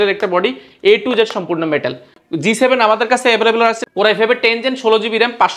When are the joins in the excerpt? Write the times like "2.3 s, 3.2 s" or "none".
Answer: 2.2 s, 3.8 s